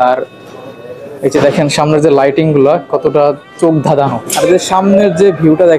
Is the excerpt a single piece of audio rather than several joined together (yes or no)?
no